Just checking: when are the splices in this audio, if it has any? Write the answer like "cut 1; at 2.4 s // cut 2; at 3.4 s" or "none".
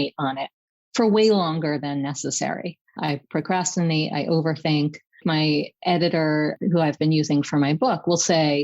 cut 1; at 3.1 s // cut 2; at 5.2 s // cut 3; at 6.5 s